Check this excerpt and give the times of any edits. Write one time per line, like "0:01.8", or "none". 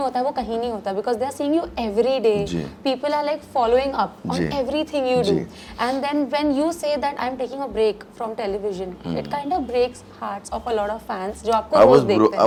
none